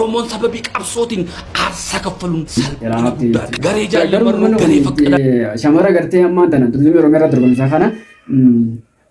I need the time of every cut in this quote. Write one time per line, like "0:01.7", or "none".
0:02.6

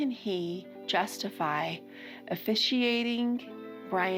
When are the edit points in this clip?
none

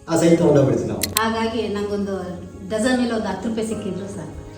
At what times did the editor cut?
0:01.0

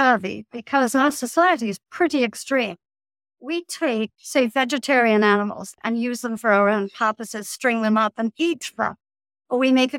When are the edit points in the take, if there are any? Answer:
0:04.2
0:05.7

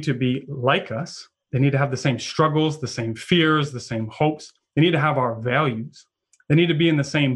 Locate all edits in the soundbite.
none

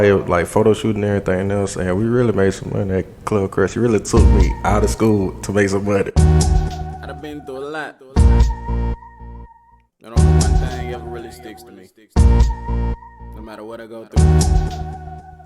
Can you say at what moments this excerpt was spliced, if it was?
0:06.1

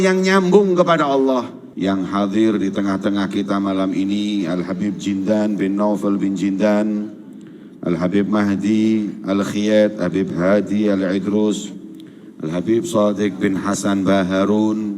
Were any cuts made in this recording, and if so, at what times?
0:01.6

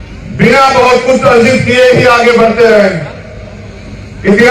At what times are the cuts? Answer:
0:01.5

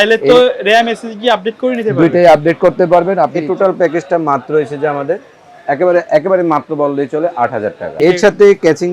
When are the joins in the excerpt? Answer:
0:03.4
0:07.9

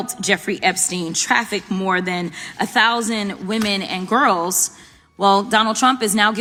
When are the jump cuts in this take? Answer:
none

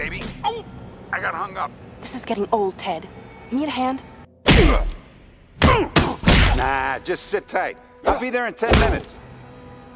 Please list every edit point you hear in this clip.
0:06.8

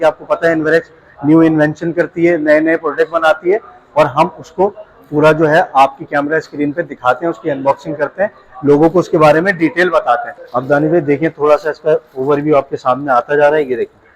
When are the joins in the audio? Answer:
0:10.4

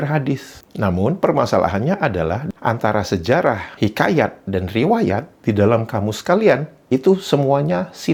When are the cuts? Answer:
none

